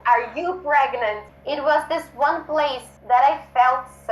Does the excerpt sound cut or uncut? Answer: cut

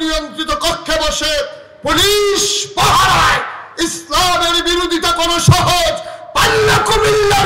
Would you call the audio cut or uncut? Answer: uncut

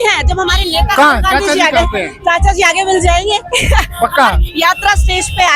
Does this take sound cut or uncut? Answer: uncut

